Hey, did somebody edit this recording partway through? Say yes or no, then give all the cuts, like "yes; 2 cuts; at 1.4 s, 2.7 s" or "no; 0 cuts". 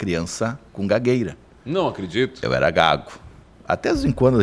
no; 0 cuts